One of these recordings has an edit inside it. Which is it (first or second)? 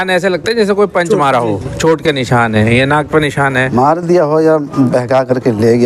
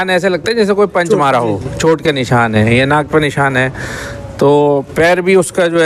first